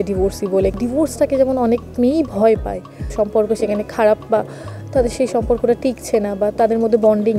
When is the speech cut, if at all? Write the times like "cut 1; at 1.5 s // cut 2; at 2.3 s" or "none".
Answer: cut 1; at 0.7 s // cut 2; at 3.1 s